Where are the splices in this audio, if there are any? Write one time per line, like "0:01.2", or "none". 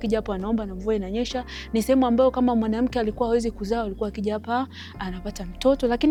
none